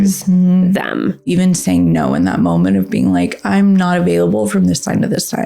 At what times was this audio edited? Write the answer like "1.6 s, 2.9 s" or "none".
1.3 s